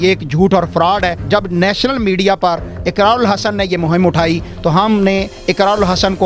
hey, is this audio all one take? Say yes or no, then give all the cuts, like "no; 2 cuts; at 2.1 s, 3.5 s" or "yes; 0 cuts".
no; 1 cut; at 1.2 s